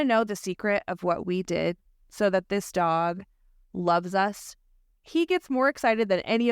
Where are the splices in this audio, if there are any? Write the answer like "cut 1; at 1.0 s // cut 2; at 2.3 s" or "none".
cut 1; at 5.0 s